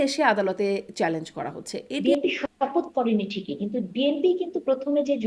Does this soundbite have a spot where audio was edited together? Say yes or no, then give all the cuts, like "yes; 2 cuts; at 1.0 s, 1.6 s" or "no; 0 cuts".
yes; 1 cut; at 2.0 s